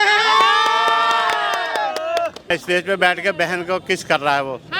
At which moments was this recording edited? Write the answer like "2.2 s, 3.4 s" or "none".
2.6 s